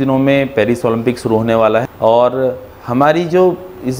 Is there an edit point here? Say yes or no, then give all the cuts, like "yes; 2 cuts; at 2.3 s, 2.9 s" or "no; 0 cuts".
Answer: yes; 1 cut; at 1.9 s